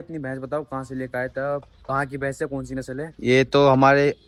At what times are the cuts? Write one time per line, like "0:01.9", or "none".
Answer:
none